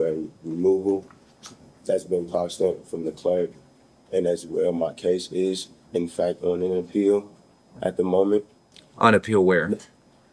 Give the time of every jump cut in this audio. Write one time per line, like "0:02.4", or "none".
none